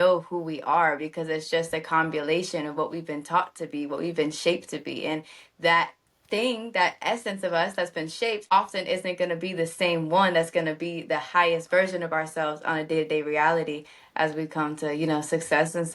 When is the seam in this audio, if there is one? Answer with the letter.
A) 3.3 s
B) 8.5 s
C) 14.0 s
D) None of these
B